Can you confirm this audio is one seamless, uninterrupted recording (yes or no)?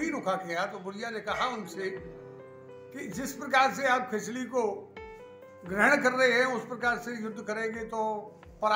yes